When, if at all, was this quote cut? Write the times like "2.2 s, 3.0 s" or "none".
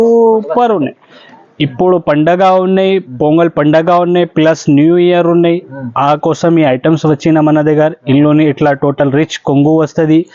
none